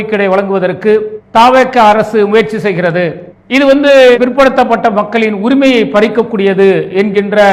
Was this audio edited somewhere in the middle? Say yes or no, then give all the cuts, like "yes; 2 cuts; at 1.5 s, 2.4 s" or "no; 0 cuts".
no; 0 cuts